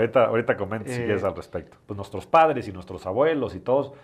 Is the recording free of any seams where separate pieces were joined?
no; 1 cut; at 1.8 s

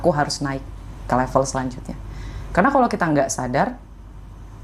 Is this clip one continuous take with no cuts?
yes; 0 cuts

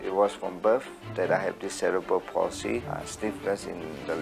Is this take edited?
yes; 1 cut; at 2.9 s

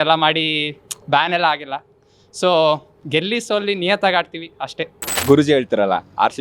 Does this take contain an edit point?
yes; 1 cut; at 5.2 s

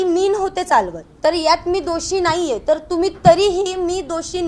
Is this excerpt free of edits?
no; 1 cut; at 1.0 s

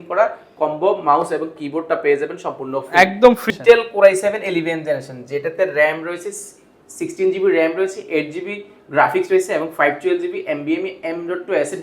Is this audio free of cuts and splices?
no; 1 cut; at 3.5 s

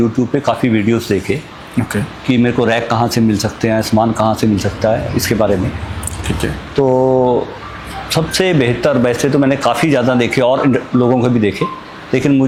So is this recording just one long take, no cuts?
yes; 0 cuts

